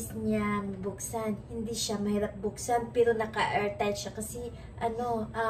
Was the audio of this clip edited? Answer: no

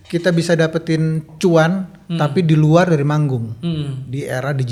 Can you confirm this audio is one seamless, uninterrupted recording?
yes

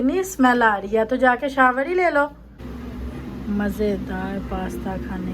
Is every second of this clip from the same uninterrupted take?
no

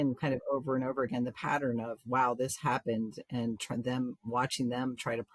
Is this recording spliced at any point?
no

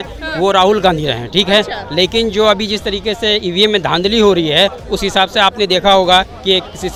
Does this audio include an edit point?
no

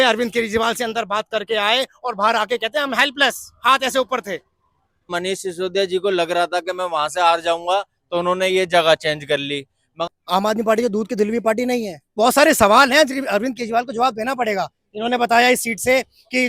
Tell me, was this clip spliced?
yes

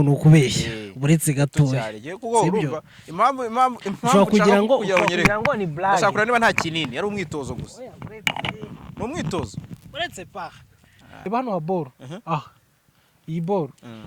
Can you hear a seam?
yes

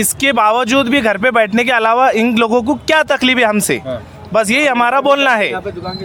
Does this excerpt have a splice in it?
no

